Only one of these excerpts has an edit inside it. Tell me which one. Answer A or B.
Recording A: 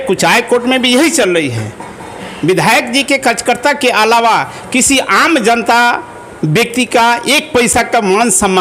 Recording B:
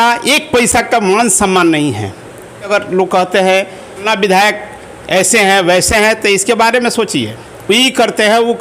B